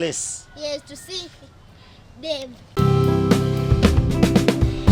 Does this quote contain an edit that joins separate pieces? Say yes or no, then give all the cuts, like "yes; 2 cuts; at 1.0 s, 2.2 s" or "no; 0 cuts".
no; 0 cuts